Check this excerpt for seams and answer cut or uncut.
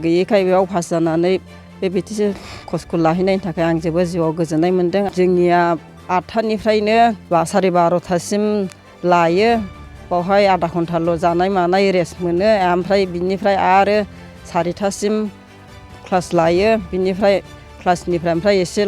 cut